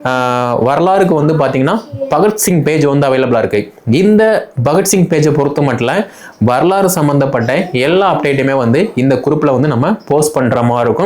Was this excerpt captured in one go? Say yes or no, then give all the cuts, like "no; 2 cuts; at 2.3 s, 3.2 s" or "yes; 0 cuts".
yes; 0 cuts